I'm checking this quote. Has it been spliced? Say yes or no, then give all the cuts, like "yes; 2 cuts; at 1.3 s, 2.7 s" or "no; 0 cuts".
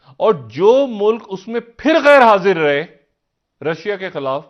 no; 0 cuts